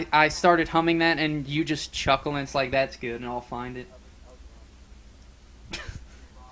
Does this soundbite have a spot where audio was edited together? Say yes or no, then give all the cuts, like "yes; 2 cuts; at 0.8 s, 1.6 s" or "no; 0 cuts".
yes; 1 cut; at 4.1 s